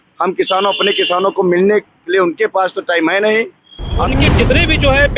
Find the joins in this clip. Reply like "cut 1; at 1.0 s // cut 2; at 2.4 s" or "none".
cut 1; at 4.1 s

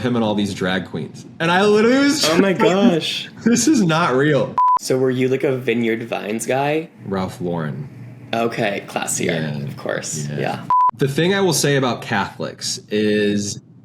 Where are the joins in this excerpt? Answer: cut 1; at 4.6 s // cut 2; at 10.8 s

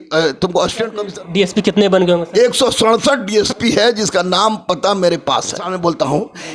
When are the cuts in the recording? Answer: cut 1; at 1.0 s // cut 2; at 5.7 s

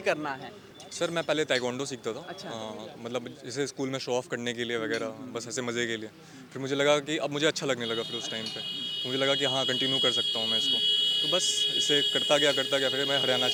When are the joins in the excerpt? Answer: none

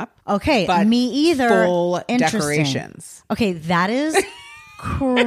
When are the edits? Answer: none

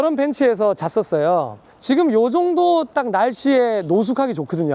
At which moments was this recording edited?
cut 1; at 1.7 s

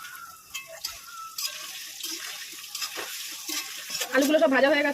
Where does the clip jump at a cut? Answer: cut 1; at 3.9 s

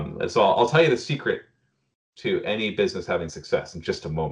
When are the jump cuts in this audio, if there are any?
none

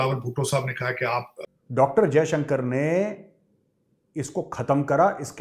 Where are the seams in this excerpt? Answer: cut 1; at 1.4 s

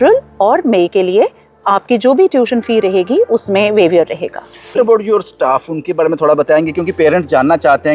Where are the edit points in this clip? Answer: cut 1; at 4.8 s

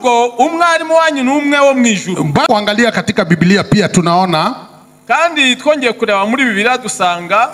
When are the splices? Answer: cut 1; at 2.5 s

